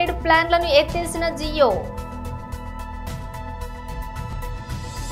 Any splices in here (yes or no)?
no